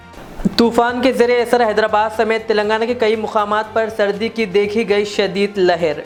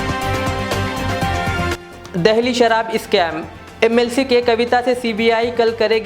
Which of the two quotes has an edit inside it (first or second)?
second